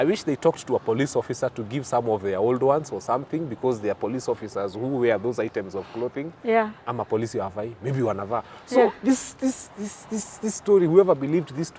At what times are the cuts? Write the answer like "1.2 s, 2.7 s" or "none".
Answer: none